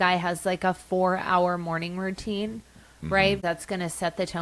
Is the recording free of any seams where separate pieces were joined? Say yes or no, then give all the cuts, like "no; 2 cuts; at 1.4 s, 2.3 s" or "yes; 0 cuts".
no; 1 cut; at 3.4 s